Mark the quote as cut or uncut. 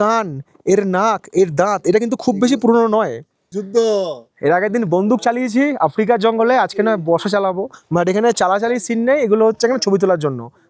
uncut